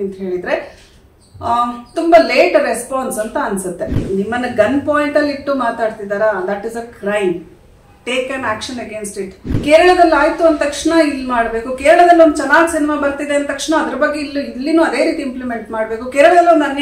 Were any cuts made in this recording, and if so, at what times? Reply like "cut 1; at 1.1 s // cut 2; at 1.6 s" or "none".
cut 1; at 4.0 s // cut 2; at 9.5 s